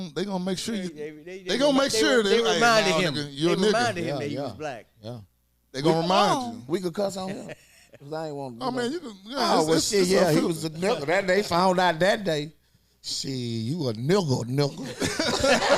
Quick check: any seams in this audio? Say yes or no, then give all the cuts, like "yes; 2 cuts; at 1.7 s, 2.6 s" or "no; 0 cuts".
no; 0 cuts